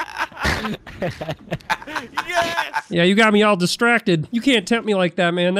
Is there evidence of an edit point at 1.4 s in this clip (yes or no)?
no